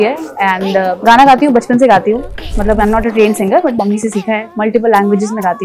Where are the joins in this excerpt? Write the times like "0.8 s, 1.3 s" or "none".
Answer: 1.0 s, 2.5 s